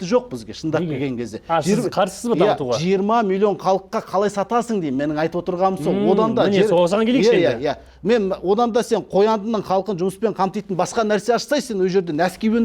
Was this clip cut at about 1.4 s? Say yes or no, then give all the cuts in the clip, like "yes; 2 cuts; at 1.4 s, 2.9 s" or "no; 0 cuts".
no; 0 cuts